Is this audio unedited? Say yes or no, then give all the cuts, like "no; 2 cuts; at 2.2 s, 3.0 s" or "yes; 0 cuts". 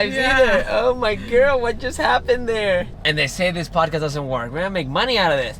no; 1 cut; at 2.9 s